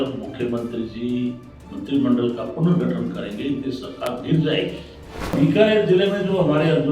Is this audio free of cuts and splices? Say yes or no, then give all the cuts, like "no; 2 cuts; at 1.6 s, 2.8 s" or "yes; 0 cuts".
no; 1 cut; at 5.3 s